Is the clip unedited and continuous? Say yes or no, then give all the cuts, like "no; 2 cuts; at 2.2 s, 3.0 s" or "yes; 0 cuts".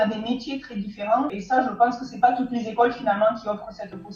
no; 1 cut; at 1.4 s